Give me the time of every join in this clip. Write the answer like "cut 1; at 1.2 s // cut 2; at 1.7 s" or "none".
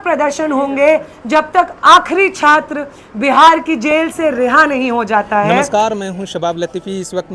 cut 1; at 5.7 s